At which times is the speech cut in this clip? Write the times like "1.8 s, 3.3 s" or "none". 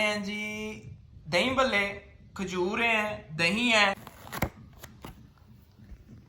none